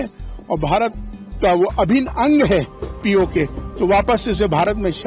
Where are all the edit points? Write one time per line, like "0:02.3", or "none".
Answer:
none